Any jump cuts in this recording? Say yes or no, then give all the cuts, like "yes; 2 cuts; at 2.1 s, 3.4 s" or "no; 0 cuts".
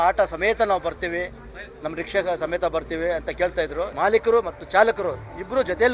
yes; 1 cut; at 3.9 s